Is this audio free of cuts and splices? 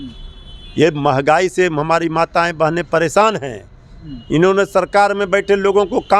yes; 0 cuts

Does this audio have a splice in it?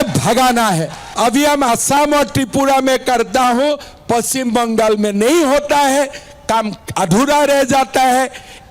yes; 1 cut; at 1.0 s

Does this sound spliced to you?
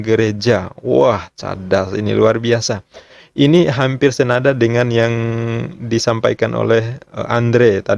no; 0 cuts

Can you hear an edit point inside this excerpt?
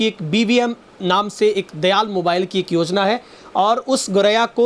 no; 0 cuts

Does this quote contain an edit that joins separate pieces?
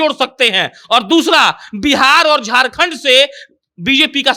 no; 0 cuts

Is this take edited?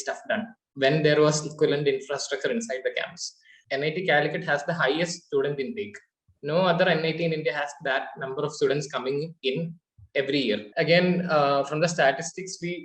yes; 2 cuts; at 3.6 s, 10.7 s

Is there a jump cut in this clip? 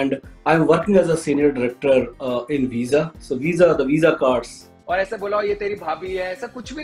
yes; 1 cut; at 4.7 s

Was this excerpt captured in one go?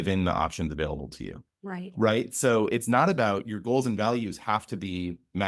yes; 0 cuts

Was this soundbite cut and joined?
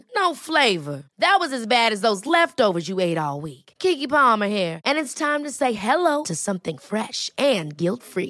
no; 0 cuts

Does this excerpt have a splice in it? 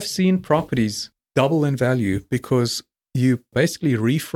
yes; 1 cut; at 1.2 s

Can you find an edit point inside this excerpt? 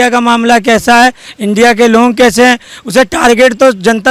no; 0 cuts

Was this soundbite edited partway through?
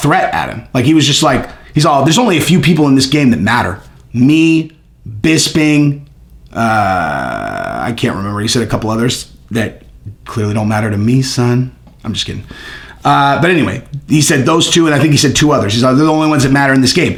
no; 0 cuts

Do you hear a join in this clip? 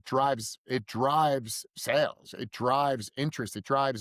no; 0 cuts

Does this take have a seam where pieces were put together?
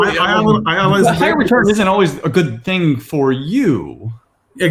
no; 0 cuts

